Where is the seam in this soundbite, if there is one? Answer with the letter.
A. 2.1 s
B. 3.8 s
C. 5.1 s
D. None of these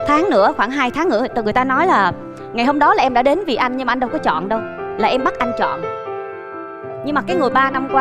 D